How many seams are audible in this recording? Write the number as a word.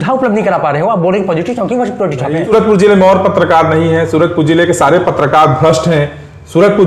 one